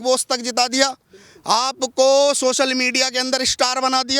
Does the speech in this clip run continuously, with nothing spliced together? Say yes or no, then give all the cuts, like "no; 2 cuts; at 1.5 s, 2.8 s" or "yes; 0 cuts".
yes; 0 cuts